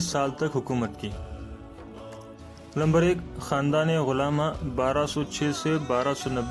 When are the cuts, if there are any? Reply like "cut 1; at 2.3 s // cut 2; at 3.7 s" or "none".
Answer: cut 1; at 1.2 s // cut 2; at 2.7 s